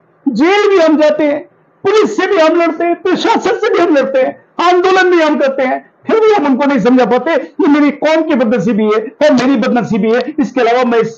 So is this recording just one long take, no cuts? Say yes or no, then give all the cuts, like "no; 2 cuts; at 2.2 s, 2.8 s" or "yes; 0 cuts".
yes; 0 cuts